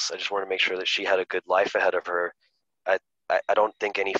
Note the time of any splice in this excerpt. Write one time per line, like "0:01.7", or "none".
none